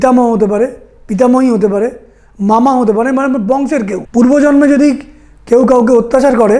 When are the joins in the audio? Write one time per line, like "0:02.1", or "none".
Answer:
0:04.0